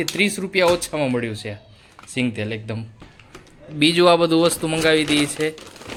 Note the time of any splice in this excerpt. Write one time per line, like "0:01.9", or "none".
none